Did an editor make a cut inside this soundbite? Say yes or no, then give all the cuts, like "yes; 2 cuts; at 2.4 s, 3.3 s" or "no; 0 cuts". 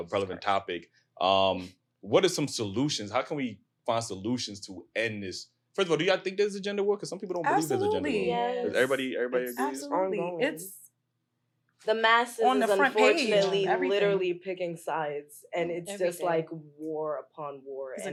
no; 0 cuts